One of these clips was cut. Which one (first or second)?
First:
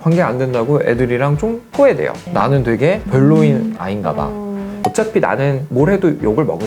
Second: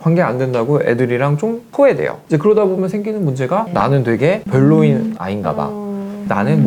first